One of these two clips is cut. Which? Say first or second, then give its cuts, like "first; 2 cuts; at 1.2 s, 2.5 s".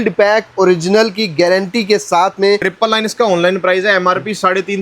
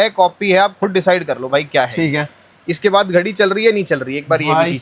first; 1 cut; at 2.7 s